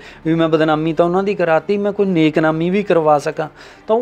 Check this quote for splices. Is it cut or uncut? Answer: uncut